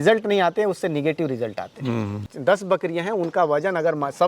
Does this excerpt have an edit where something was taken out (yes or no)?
yes